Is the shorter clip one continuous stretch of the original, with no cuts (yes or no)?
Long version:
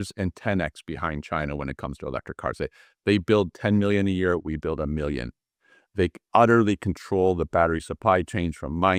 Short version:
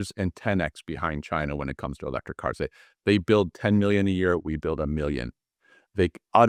yes